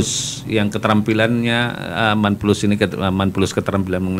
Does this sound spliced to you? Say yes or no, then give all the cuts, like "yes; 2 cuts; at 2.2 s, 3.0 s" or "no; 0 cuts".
no; 0 cuts